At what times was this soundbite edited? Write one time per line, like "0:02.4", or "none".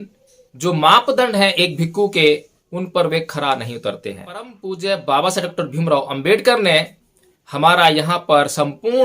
0:04.6

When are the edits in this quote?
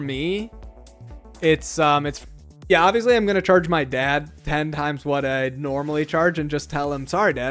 0:02.1

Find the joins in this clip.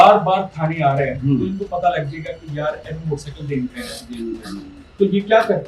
0:04.8

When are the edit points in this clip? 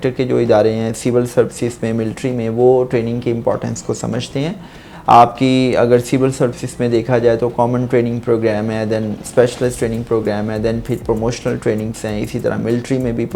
none

